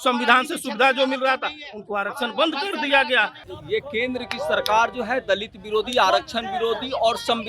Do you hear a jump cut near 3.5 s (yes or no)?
yes